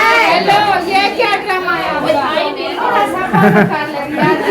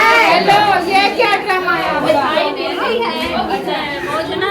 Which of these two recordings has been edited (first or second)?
first